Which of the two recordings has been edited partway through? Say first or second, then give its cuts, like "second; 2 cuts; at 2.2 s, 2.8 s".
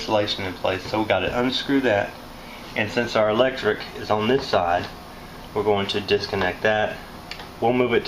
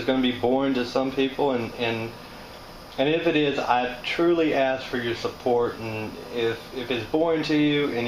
first; 1 cut; at 3.6 s